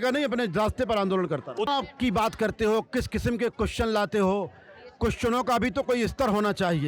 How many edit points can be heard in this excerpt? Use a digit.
1